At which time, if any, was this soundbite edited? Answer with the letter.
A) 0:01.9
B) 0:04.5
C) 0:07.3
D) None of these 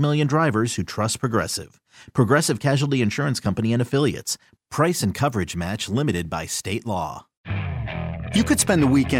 C